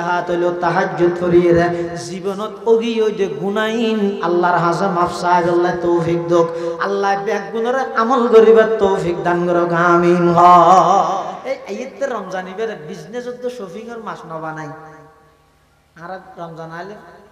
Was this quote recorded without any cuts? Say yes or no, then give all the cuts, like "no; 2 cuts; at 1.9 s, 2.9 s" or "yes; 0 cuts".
no; 1 cut; at 11.4 s